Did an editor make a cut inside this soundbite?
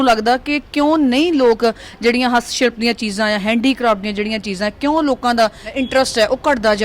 yes; 1 cut; at 5.7 s

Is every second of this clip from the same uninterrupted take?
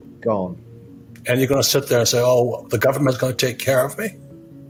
yes; 0 cuts

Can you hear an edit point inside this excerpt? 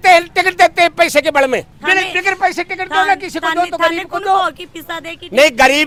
no; 0 cuts

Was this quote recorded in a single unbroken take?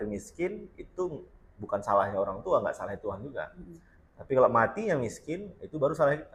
yes; 0 cuts

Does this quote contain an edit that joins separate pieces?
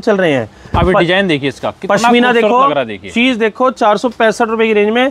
no; 0 cuts

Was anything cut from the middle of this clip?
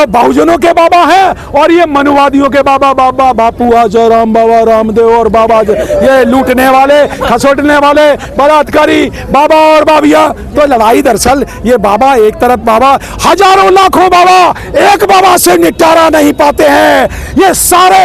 no; 0 cuts

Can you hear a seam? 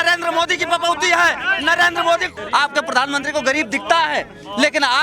yes; 1 cut; at 2.4 s

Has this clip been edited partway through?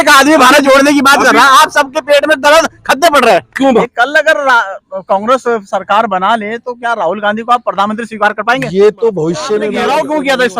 yes; 2 cuts; at 3.8 s, 9.7 s

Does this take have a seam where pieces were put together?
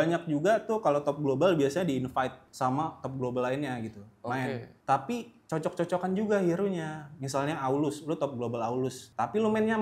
no; 0 cuts

